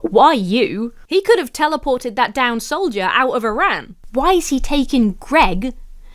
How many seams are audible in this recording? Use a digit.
1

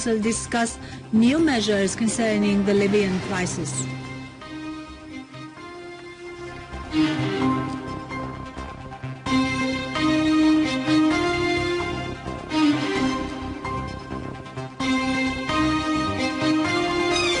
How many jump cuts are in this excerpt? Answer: 1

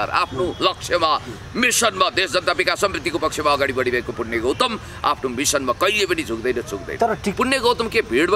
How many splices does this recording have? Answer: 1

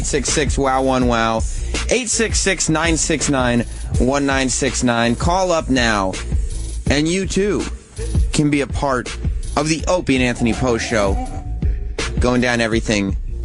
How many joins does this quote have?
1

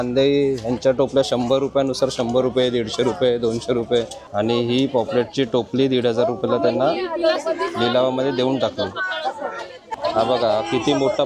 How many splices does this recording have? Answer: 2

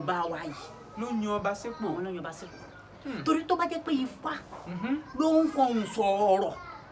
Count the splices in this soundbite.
0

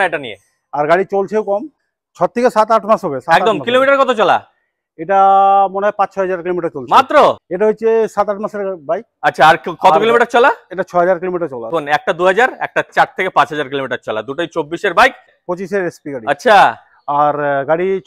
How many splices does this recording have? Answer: 4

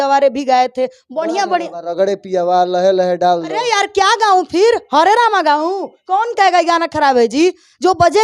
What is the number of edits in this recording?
0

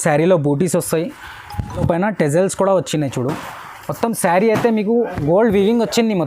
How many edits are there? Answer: 1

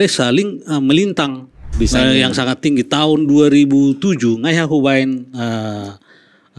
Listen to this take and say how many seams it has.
1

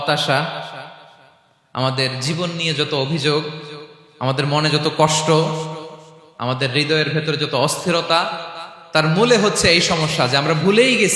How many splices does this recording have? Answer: 0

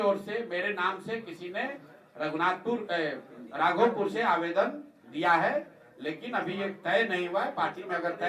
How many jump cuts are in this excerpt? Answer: 0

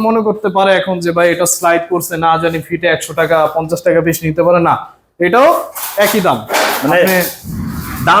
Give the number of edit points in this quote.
0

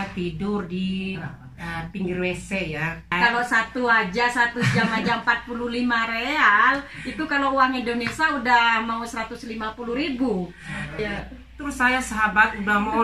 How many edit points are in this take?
2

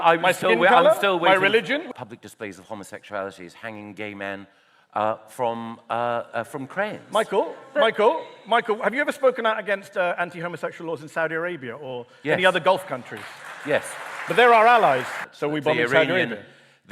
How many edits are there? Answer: 2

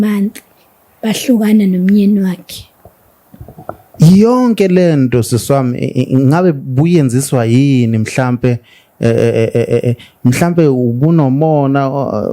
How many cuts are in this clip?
0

